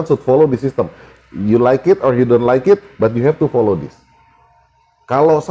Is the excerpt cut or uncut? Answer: uncut